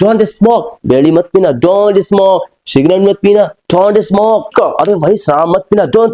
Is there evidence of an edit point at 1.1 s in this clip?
no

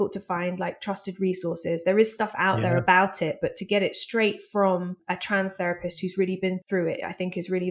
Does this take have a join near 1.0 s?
no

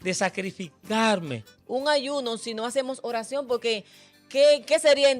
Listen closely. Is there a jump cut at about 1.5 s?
yes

